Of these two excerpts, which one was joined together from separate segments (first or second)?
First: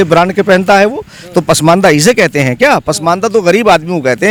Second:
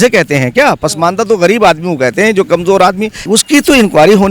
second